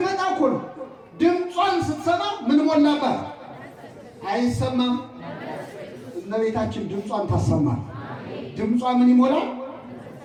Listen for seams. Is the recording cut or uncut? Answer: uncut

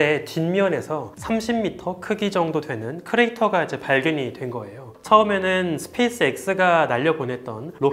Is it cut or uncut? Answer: cut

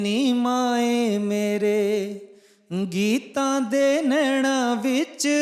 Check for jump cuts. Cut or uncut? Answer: uncut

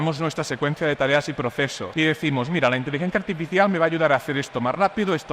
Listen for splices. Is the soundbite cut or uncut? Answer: cut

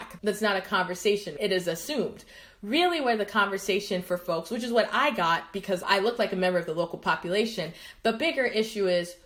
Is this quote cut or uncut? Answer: uncut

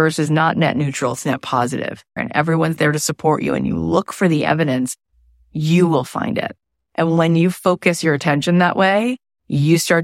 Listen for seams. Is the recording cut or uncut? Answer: cut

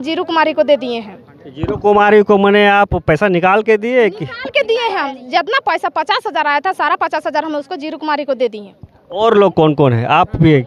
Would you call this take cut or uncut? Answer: uncut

